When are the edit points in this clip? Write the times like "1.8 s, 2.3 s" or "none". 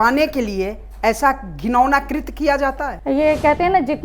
2.9 s